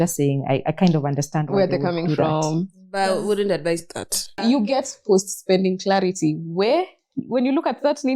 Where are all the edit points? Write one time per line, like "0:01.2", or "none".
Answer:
0:04.4